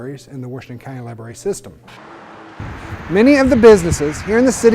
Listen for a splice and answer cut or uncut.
cut